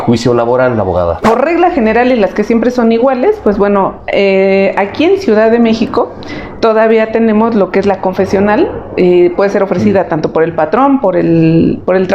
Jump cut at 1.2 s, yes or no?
yes